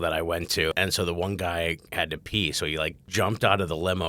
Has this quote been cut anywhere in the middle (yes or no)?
yes